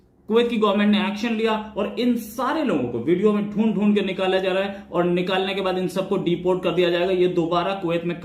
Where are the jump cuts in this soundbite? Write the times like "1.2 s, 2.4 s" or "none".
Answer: none